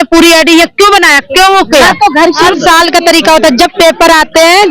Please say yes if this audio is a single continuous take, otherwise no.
no